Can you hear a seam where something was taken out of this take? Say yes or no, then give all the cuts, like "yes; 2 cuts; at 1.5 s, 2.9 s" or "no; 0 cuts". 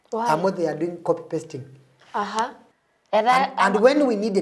yes; 1 cut; at 2.6 s